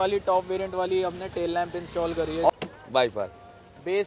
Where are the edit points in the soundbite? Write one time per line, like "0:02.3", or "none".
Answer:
0:02.5